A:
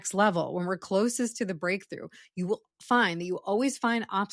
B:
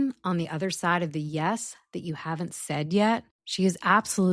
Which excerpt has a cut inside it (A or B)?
B